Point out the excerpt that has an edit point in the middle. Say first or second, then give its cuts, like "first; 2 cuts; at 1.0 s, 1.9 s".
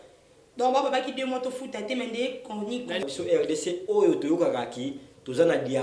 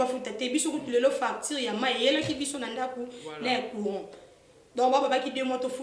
first; 1 cut; at 3.1 s